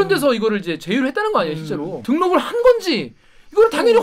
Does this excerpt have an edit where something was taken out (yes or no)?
yes